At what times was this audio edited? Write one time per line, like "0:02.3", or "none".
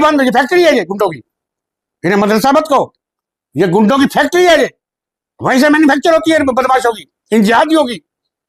none